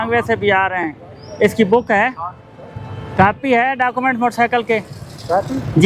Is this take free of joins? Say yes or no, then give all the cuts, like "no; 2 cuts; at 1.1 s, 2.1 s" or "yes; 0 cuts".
yes; 0 cuts